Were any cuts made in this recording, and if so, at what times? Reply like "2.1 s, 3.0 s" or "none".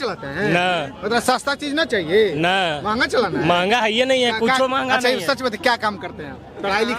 none